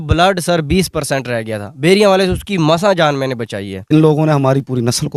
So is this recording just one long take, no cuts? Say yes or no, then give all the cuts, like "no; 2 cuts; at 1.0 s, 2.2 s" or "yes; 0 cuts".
no; 1 cut; at 3.9 s